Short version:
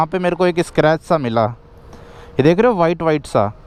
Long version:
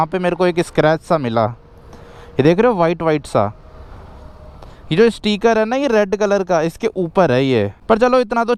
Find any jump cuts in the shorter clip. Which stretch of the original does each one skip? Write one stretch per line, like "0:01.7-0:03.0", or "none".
none

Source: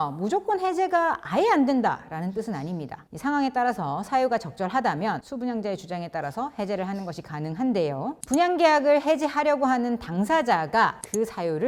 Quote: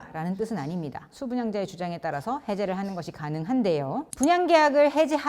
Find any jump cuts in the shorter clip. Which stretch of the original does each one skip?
0:03.1-0:05.3

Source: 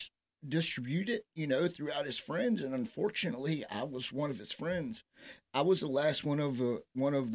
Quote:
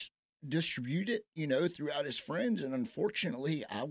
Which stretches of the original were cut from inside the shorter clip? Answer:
none

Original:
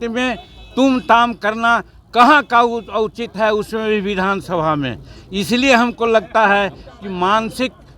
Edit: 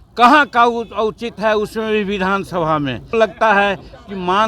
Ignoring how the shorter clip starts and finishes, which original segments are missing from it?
0:05.1-0:06.1

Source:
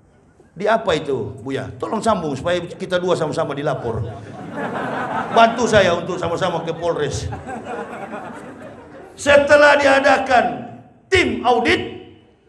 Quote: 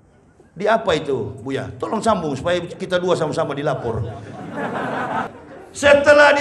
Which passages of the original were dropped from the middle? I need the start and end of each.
0:05.3-0:08.7

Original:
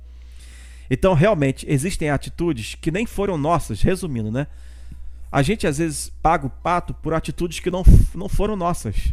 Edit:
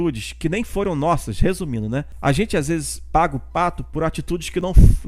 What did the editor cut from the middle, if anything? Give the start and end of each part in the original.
0:04.5-0:05.2

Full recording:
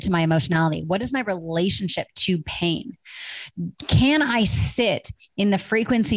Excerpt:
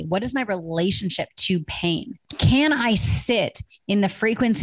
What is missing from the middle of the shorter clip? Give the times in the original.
0:03.1-0:03.8

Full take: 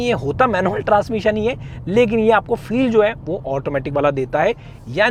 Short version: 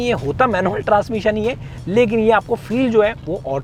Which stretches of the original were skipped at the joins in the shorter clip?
none

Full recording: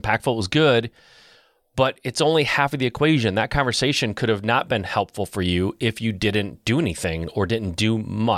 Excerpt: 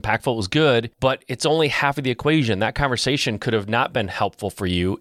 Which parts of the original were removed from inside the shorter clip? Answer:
0:00.9-0:01.7

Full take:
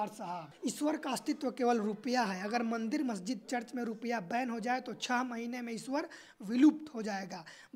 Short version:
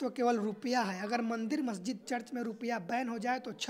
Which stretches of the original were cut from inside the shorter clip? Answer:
none

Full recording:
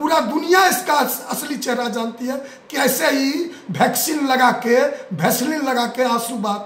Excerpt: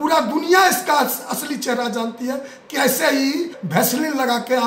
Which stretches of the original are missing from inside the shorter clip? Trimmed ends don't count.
0:03.6-0:05.1

